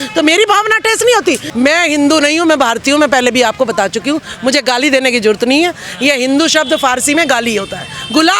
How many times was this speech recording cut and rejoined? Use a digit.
1